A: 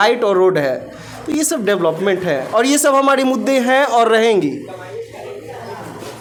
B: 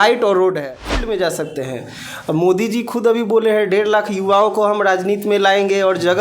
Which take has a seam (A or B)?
B